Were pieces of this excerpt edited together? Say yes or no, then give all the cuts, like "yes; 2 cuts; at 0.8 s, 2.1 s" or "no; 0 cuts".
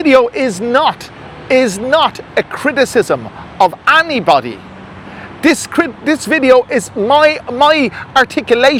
no; 0 cuts